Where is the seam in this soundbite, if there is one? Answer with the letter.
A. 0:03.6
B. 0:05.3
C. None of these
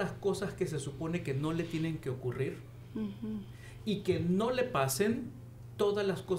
C